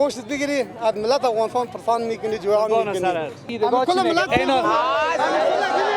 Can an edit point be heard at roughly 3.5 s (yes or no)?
yes